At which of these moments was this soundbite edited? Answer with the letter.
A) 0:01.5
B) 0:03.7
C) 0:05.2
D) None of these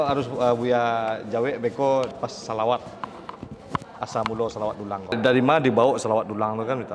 C